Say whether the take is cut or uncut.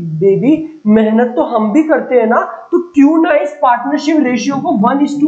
uncut